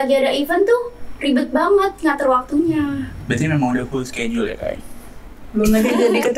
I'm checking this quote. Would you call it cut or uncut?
uncut